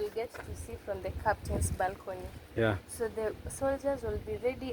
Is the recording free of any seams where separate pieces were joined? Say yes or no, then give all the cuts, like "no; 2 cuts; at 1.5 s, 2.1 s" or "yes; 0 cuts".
yes; 0 cuts